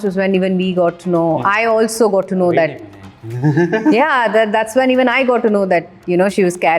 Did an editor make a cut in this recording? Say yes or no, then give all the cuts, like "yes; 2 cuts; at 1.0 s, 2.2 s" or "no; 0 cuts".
no; 0 cuts